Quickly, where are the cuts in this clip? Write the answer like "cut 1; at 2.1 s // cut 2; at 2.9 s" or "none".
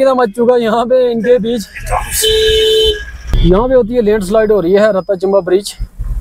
none